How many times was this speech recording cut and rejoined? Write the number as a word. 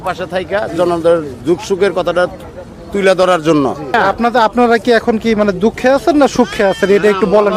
one